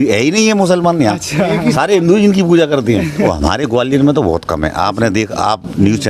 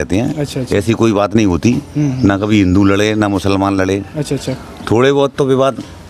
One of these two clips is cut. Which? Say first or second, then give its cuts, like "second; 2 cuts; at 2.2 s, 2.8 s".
first; 1 cut; at 3.2 s